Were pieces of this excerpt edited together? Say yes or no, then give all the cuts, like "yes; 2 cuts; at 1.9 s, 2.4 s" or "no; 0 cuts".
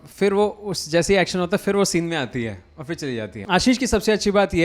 yes; 1 cut; at 3.4 s